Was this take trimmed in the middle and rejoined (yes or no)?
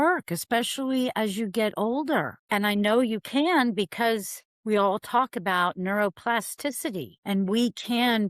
yes